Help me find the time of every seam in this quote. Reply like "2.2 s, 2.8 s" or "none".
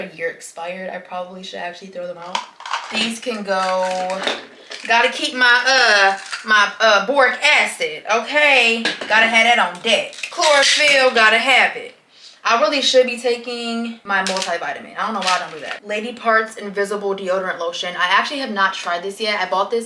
none